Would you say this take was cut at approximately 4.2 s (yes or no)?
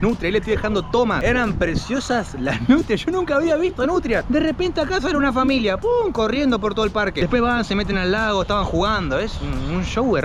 no